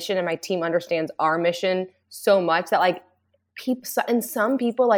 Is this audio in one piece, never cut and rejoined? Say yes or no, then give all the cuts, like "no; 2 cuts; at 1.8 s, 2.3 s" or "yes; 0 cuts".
yes; 0 cuts